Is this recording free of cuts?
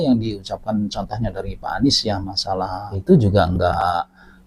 yes; 0 cuts

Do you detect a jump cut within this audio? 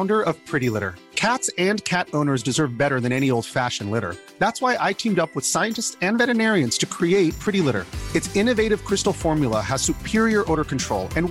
no; 0 cuts

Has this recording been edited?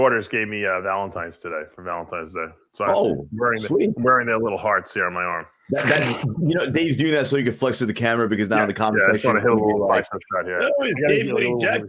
no; 0 cuts

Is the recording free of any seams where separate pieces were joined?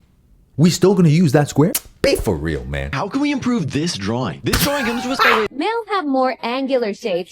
no; 2 cuts; at 3.0 s, 5.5 s

